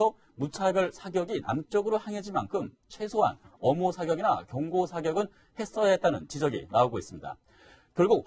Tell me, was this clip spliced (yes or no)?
no